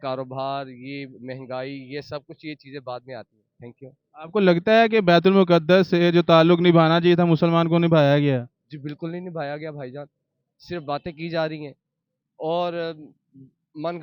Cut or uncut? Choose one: uncut